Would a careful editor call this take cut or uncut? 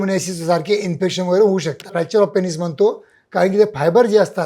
cut